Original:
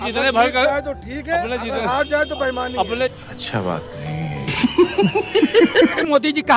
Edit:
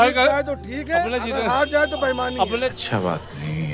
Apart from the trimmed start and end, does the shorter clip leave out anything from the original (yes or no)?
yes